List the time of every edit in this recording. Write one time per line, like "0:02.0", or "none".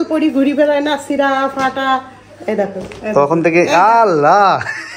none